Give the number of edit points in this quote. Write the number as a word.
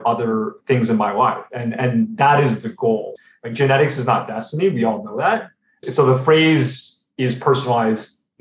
two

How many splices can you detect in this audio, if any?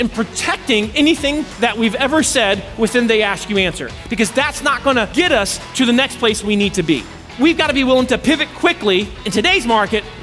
four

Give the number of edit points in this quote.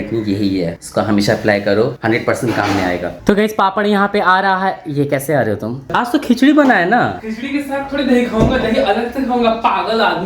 one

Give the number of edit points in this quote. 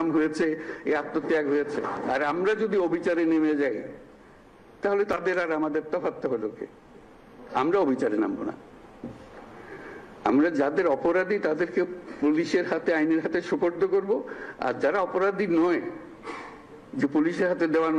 zero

